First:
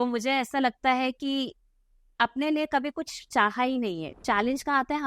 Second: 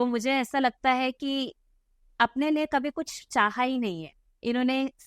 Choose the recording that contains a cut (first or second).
first